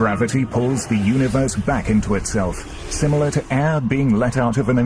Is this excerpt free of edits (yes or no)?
no